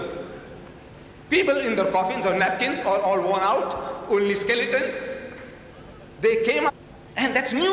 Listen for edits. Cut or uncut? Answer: uncut